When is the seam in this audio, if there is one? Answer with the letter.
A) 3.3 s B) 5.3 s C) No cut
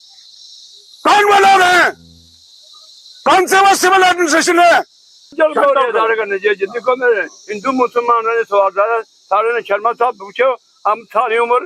B